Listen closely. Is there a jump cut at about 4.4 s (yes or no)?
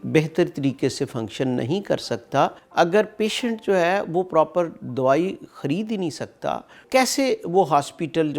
no